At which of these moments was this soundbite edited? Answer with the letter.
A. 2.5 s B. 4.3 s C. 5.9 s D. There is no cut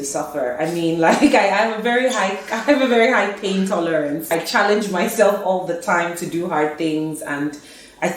B